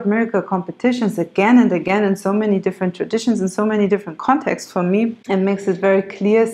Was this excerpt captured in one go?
no; 1 cut; at 5.2 s

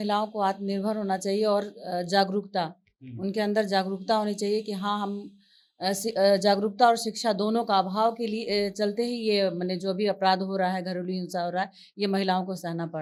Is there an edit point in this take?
no; 0 cuts

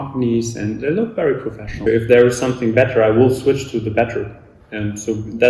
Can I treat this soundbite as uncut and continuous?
no; 1 cut; at 1.9 s

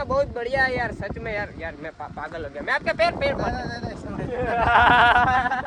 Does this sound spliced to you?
no; 0 cuts

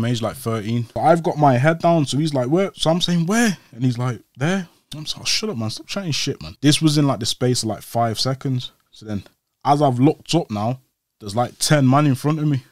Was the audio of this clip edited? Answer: yes; 2 cuts; at 0.9 s, 6.5 s

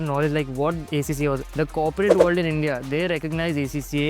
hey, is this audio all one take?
no; 1 cut; at 1.4 s

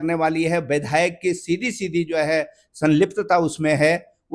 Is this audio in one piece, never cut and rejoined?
yes; 0 cuts

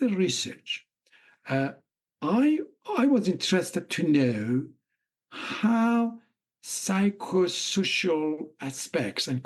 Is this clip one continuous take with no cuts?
yes; 0 cuts

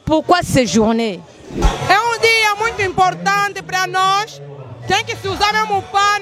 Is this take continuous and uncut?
no; 1 cut; at 1.7 s

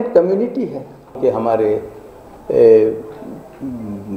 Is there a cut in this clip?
yes; 1 cut; at 1.2 s

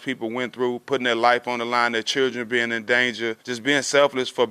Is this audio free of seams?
no; 1 cut; at 3.5 s

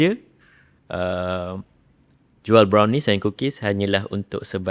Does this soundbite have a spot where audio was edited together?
no; 0 cuts

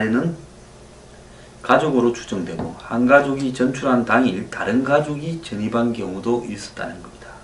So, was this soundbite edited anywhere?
yes; 1 cut; at 4.2 s

